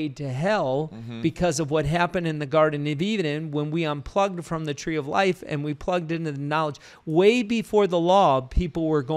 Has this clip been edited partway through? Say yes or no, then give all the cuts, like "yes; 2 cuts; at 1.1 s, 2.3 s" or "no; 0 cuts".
no; 0 cuts